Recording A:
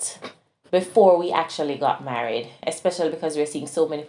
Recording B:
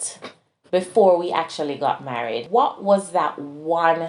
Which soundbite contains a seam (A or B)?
B